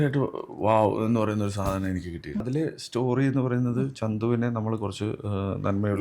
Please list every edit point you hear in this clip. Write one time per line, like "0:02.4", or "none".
0:02.4